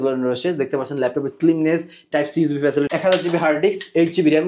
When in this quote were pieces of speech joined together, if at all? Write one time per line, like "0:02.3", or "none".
0:02.9